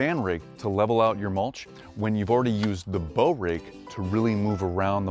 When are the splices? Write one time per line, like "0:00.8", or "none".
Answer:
none